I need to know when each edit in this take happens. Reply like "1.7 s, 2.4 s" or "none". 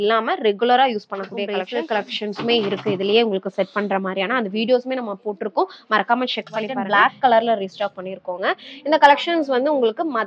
1.6 s, 6.8 s